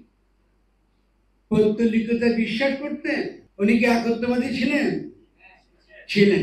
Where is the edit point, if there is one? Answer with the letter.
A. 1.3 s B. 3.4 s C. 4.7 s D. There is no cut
B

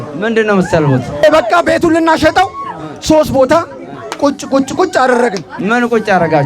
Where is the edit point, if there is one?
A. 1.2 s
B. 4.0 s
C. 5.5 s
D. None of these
A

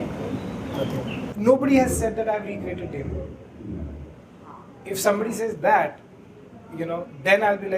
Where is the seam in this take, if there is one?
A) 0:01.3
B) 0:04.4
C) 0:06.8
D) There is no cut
A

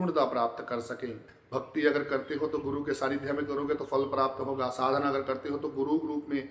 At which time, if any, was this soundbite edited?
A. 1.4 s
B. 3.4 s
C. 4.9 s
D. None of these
A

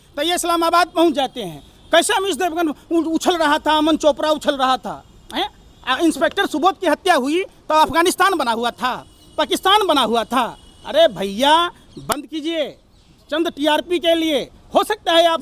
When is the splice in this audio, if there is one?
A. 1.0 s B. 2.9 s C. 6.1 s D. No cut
D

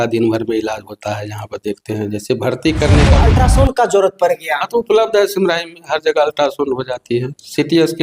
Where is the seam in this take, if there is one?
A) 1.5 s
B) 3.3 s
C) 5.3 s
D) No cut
B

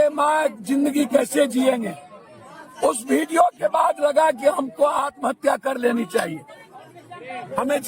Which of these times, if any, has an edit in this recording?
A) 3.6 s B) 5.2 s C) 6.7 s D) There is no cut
D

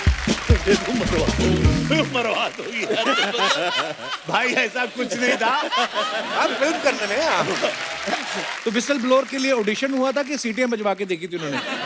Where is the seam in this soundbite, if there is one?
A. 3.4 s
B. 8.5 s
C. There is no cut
B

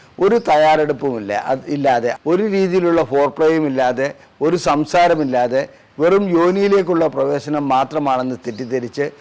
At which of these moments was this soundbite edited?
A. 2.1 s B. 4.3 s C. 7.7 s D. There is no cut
D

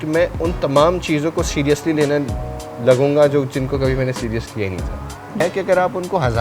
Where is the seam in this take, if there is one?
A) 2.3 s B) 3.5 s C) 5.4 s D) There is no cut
C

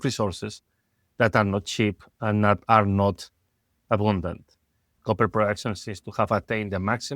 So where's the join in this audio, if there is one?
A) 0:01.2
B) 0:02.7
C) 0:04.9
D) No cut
C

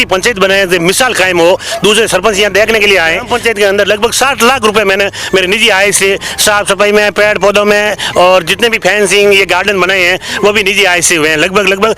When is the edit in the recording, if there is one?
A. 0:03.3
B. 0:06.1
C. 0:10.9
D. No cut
A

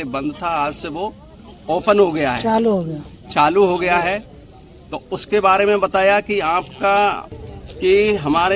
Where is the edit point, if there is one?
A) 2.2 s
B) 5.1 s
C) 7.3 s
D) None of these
C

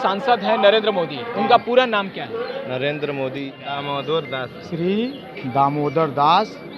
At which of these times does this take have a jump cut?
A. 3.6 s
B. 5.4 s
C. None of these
A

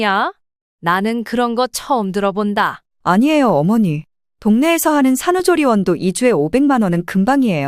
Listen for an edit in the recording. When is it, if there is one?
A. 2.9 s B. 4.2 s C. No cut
A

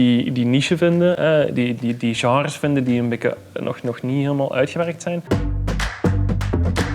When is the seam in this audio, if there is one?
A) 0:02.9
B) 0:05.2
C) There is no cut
B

